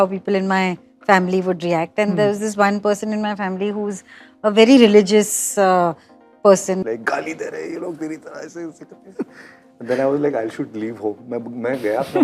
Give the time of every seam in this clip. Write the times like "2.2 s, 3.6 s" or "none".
6.8 s

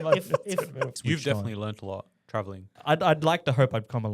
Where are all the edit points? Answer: 0.9 s, 2.6 s

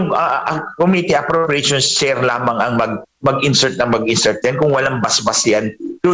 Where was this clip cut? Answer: none

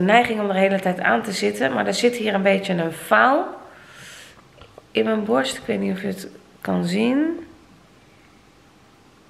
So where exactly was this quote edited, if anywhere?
none

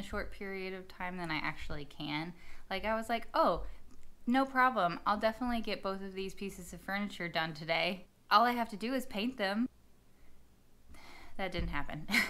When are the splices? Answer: 8.1 s, 9.7 s

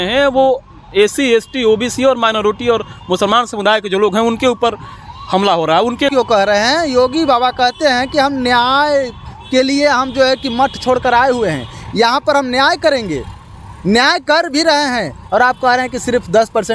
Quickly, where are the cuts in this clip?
6.1 s

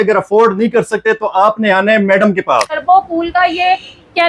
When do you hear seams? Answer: 2.8 s

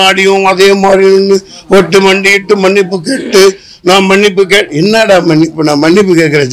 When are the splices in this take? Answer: none

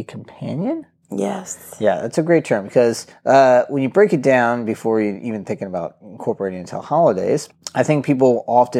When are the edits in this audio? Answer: 3.1 s, 7.6 s

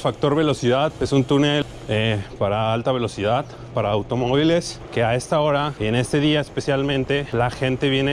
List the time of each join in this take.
0.9 s, 1.6 s, 4.8 s, 5.7 s, 7.3 s

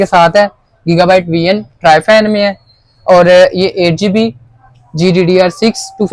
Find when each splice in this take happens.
none

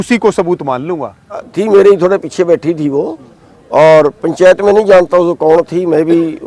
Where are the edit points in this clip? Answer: 1.5 s

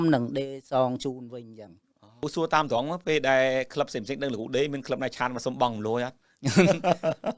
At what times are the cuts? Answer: 2.2 s

